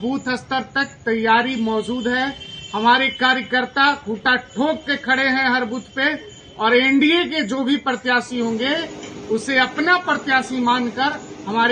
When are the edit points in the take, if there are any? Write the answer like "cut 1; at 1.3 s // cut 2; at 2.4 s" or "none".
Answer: none